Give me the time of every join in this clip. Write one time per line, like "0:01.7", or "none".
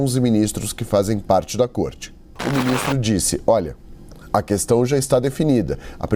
0:02.3